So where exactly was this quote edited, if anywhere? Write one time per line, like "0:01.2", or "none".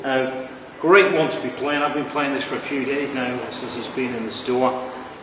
0:03.6